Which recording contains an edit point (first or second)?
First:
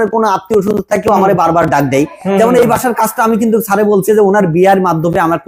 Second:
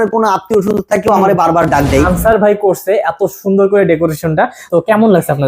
second